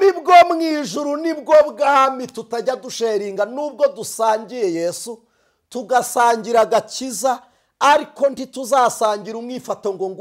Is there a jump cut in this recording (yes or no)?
no